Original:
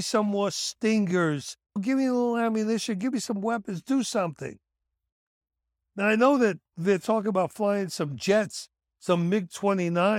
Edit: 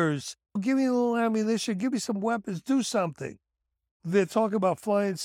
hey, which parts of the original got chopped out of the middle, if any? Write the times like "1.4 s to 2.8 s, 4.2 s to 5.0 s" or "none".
5.2 s to 6.7 s